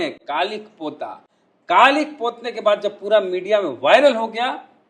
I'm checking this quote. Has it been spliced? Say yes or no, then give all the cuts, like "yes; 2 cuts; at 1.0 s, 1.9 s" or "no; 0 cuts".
no; 0 cuts